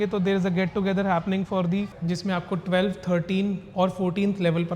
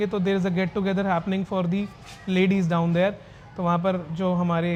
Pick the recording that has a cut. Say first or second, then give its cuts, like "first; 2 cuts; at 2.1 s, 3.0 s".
first; 1 cut; at 2.0 s